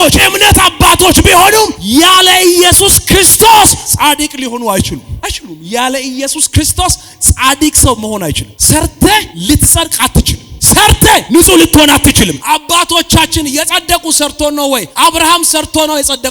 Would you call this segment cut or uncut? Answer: uncut